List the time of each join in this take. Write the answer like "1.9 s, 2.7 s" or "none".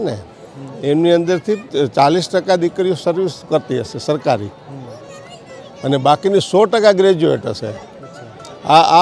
1.7 s